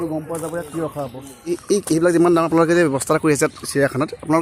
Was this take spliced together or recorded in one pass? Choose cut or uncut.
cut